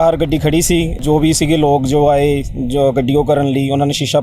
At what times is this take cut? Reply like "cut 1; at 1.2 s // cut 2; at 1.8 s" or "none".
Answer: cut 1; at 0.9 s

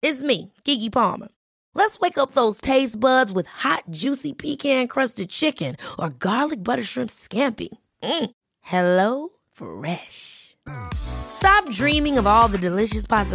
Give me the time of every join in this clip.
none

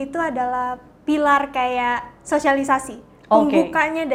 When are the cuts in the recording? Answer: none

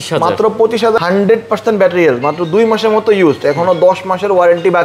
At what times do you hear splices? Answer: cut 1; at 1.0 s

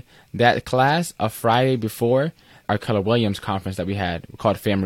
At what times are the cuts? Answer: cut 1; at 2.6 s

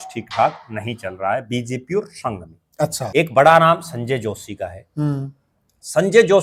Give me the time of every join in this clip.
cut 1; at 3.1 s

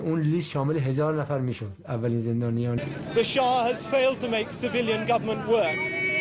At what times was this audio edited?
none

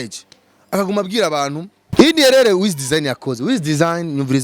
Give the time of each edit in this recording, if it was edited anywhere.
cut 1; at 1.9 s

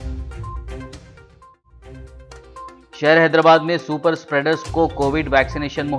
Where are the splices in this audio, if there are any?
cut 1; at 2.0 s

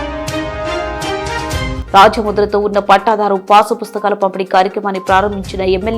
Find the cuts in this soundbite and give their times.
cut 1; at 1.8 s

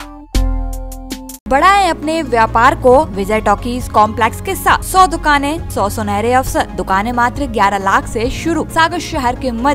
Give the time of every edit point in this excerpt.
cut 1; at 1.5 s // cut 2; at 3.2 s // cut 3; at 4.8 s // cut 4; at 5.6 s // cut 5; at 6.8 s // cut 6; at 8.7 s

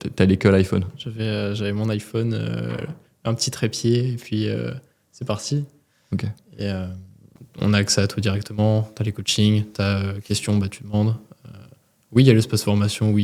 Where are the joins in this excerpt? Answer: cut 1; at 7.3 s

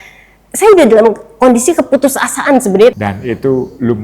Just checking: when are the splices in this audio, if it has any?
cut 1; at 2.9 s

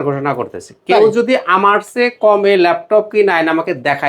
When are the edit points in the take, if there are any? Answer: none

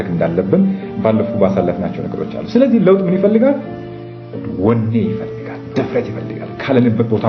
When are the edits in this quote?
none

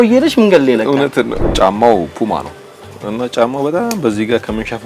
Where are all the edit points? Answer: cut 1; at 1.4 s // cut 2; at 2.9 s

